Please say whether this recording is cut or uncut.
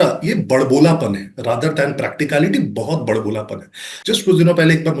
cut